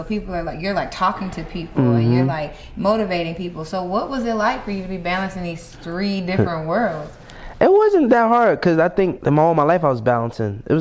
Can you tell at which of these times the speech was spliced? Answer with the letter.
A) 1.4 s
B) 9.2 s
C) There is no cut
B